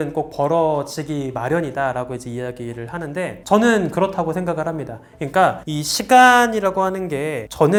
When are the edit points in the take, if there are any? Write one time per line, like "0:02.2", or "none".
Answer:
none